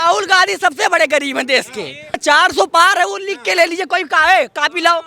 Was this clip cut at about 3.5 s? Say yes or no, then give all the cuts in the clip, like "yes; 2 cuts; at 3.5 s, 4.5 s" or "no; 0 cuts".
no; 1 cut; at 2.2 s